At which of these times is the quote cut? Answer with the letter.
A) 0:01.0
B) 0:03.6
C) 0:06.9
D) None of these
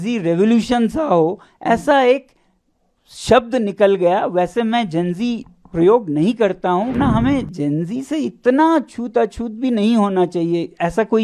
C